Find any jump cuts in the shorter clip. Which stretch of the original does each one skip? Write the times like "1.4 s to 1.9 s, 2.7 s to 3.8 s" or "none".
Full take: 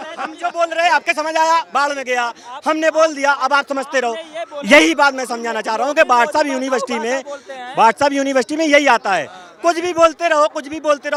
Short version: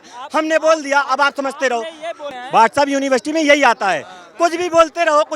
4.5 s to 7.4 s